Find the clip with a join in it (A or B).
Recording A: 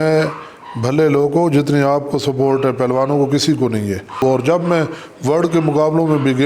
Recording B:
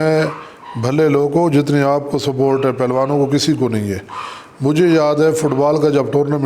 A